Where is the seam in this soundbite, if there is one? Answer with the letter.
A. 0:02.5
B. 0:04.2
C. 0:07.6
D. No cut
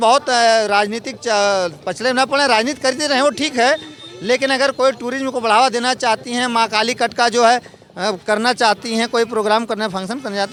D